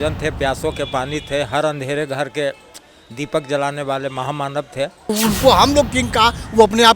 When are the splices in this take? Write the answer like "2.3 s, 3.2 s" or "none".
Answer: 5.1 s